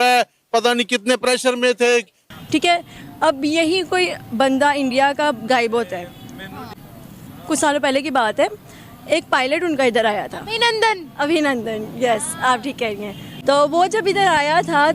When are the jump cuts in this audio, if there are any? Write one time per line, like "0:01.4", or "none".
0:02.2